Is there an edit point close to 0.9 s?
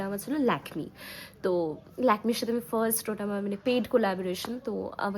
no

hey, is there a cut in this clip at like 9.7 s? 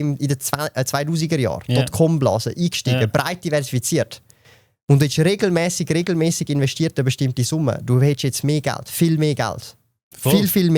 no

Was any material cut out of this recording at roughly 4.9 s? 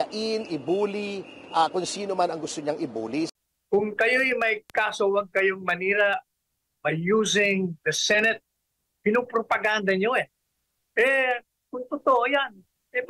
no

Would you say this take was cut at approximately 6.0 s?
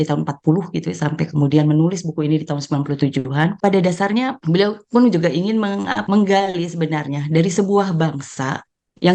yes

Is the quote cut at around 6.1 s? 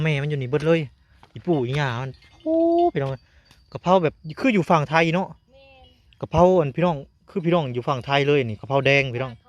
no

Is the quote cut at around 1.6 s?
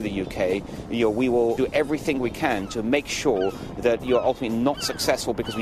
yes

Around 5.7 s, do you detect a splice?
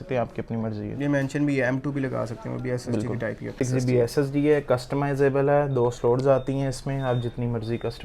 no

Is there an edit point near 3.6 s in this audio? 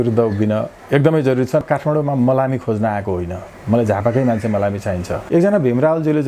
no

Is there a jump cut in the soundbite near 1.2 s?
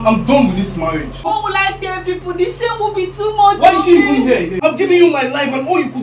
yes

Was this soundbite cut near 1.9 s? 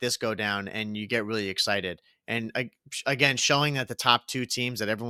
no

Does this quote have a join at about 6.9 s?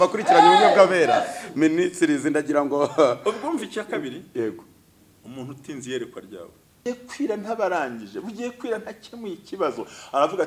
yes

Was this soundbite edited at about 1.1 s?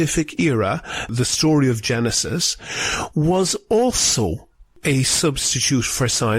yes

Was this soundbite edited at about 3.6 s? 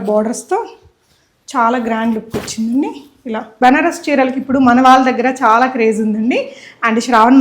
yes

